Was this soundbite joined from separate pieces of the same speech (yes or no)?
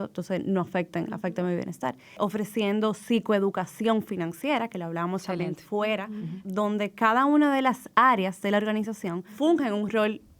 yes